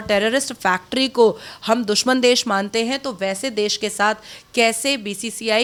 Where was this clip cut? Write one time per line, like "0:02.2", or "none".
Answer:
none